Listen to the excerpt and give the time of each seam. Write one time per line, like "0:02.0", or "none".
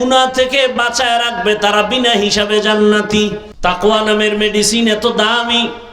0:03.5